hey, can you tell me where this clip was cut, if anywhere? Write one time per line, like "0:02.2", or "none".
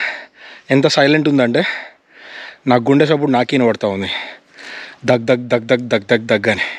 none